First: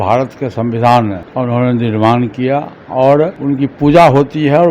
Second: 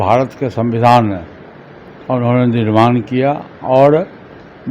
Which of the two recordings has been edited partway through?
first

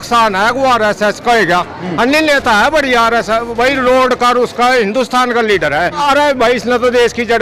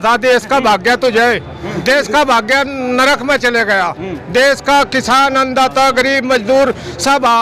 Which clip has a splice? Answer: first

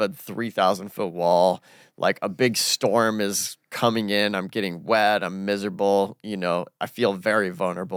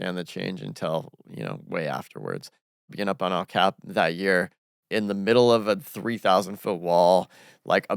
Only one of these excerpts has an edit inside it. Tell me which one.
second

